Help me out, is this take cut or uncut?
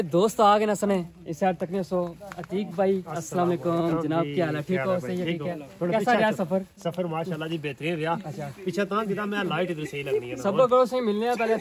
uncut